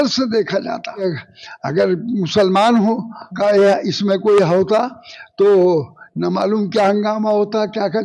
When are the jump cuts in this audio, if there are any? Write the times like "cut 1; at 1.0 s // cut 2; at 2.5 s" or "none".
cut 1; at 1.0 s

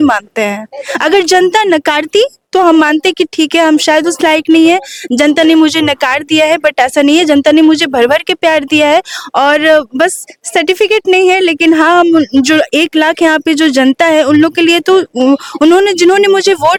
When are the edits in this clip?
none

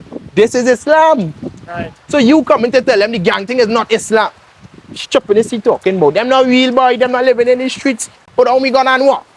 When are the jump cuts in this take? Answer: cut 1; at 8.2 s

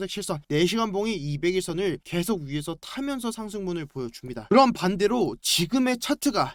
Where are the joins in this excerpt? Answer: none

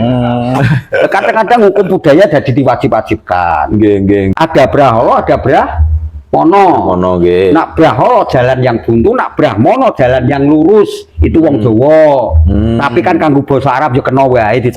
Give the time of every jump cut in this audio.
cut 1; at 4.3 s

